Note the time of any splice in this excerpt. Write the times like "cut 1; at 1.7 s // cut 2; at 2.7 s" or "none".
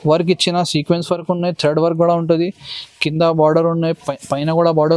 none